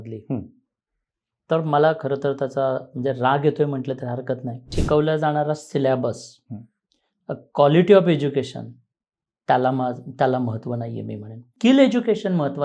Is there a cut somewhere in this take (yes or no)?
yes